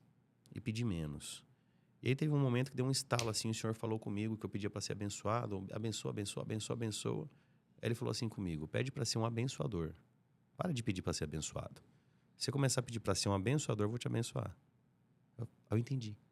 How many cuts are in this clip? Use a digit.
0